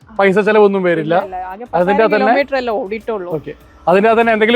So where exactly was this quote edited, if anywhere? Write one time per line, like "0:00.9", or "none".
none